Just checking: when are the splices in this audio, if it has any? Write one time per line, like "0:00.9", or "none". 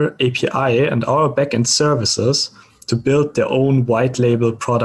none

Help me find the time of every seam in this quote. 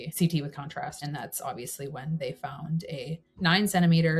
0:01.0

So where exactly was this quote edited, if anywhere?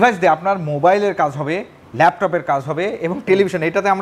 none

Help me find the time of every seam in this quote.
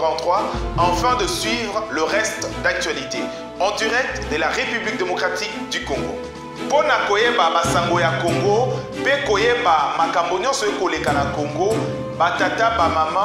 none

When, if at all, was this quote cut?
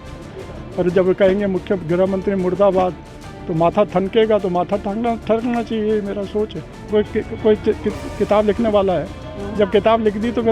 0:06.8

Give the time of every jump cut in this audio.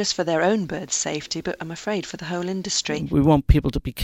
0:02.9

